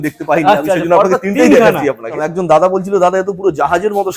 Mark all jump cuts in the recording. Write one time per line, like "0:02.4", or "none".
0:02.3